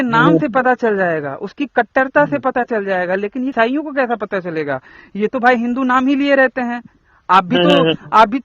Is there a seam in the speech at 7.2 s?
no; 1 cut; at 3.5 s

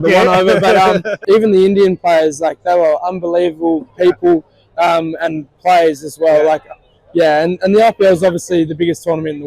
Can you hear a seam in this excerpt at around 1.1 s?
yes; 1 cut; at 1.1 s

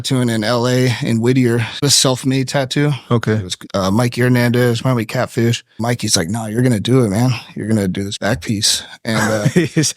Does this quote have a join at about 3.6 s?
yes; 4 cuts; at 1.7 s, 3.6 s, 5.8 s, 8.1 s

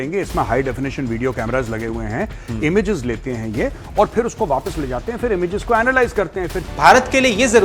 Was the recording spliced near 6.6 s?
yes; 1 cut; at 6.6 s

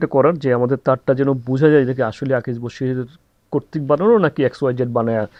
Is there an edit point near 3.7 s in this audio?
no; 0 cuts

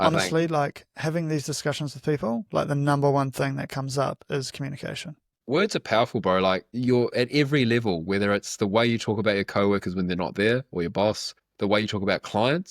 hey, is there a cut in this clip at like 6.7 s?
no; 1 cut; at 5.3 s

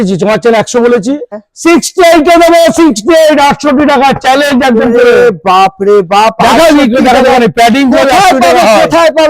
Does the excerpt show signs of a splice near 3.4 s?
no; 1 cut; at 1.3 s

